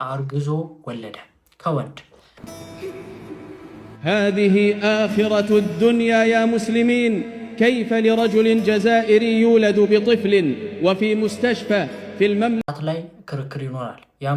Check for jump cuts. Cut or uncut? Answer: cut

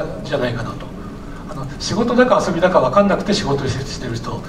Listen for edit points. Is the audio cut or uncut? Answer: uncut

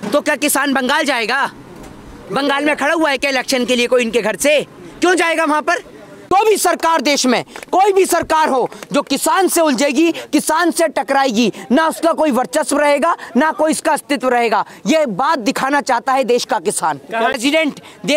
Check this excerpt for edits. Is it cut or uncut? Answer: cut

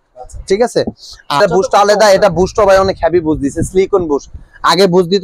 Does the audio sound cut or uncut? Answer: cut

